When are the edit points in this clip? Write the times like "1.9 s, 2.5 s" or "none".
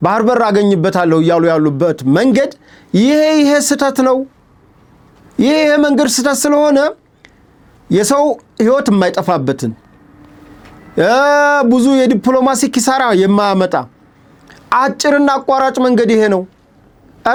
none